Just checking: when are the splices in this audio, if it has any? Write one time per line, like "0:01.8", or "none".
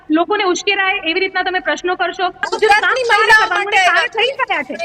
0:02.4